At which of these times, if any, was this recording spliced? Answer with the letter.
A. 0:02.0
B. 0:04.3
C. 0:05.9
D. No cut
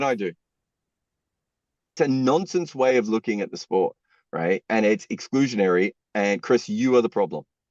A